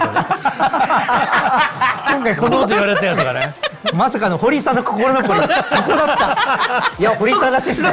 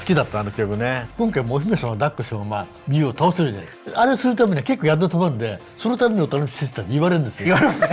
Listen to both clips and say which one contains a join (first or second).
second